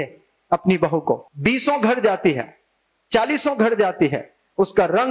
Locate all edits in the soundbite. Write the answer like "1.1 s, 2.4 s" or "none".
1.2 s